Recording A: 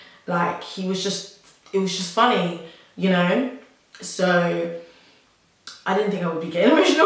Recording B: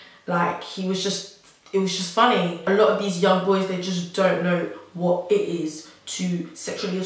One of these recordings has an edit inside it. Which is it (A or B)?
B